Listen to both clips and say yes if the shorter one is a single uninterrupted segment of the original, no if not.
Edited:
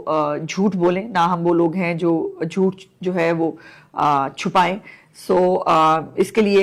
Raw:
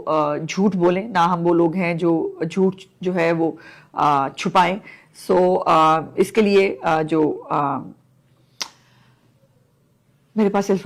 yes